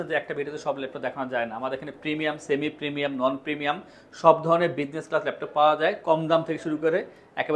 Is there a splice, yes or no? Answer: no